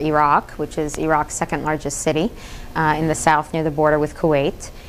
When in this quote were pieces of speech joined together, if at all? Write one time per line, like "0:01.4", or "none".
none